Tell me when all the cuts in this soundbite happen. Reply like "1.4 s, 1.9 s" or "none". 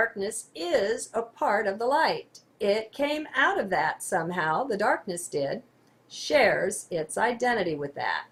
none